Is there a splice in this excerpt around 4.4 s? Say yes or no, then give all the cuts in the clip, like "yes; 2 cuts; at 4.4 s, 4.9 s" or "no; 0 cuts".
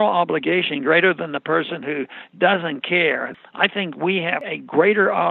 yes; 2 cuts; at 3.3 s, 4.4 s